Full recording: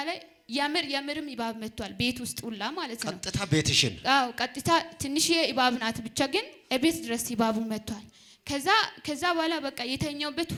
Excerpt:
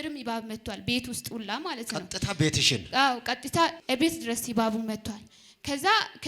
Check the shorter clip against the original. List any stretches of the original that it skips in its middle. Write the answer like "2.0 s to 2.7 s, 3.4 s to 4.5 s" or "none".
4.9 s to 6.6 s